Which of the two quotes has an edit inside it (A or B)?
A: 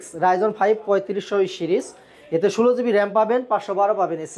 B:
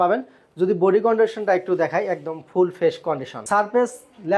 B